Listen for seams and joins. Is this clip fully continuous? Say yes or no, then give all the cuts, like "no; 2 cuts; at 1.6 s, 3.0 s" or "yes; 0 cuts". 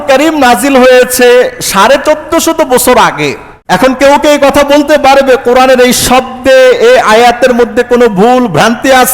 no; 1 cut; at 3.5 s